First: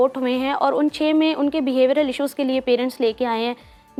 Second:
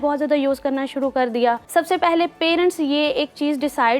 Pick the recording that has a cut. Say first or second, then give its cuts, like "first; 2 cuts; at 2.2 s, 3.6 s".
second; 1 cut; at 1.6 s